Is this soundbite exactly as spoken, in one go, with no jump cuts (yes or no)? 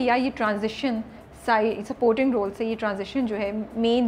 yes